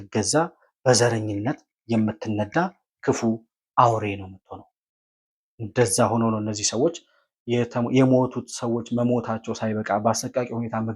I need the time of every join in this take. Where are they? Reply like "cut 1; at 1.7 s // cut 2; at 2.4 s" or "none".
none